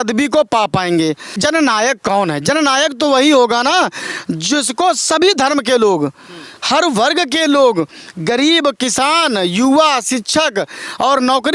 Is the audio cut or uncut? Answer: cut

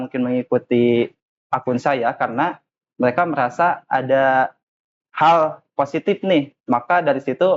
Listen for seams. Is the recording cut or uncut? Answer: uncut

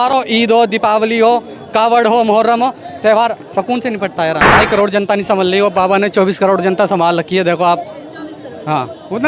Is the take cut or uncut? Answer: cut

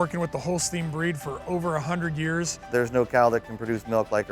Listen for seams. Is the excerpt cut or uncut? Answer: cut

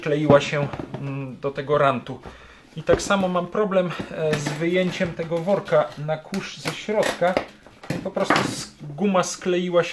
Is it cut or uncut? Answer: uncut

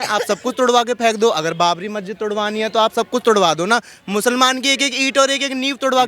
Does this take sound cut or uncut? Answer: uncut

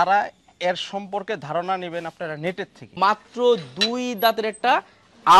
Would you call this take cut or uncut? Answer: cut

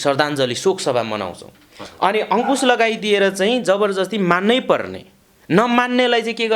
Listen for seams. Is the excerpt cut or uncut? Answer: cut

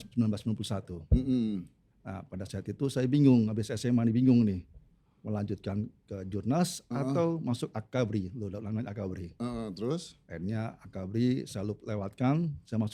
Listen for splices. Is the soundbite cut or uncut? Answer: uncut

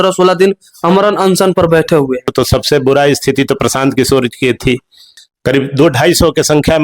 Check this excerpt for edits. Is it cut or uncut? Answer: cut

